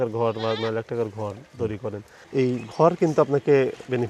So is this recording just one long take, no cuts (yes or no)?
no